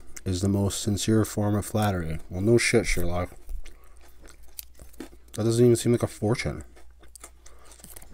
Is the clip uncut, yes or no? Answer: yes